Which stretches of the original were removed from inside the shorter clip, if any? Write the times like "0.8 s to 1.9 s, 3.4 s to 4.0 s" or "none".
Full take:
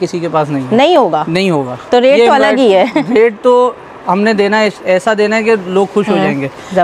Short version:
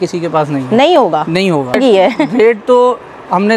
1.8 s to 2.5 s